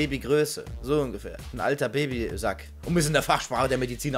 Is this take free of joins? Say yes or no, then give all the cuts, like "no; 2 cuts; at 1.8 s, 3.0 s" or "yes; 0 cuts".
yes; 0 cuts